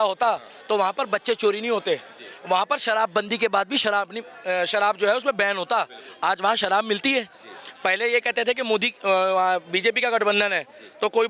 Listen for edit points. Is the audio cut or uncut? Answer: uncut